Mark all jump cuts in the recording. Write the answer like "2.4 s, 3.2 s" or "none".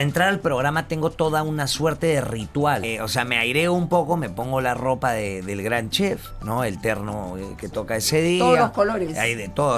2.8 s